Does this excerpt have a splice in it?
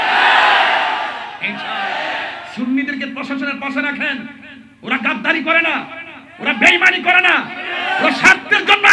yes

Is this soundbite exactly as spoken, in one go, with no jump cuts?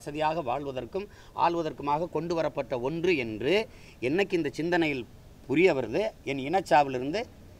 yes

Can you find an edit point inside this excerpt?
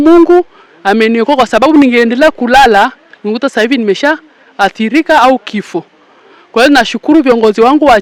no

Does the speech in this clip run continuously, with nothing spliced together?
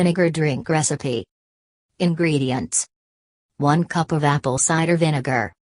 yes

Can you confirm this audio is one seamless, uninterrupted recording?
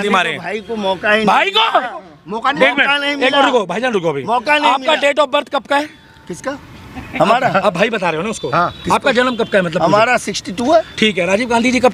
yes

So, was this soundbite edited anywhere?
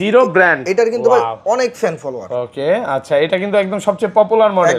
no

